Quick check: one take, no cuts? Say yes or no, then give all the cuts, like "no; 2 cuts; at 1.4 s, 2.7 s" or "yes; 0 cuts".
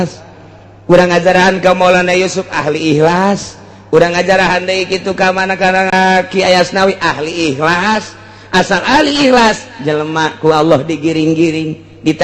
no; 1 cut; at 5.9 s